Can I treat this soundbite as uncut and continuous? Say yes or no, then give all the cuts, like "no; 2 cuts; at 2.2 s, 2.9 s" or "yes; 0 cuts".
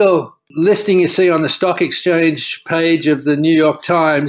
yes; 0 cuts